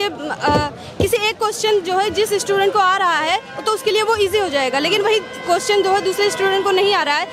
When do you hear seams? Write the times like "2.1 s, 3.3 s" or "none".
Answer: none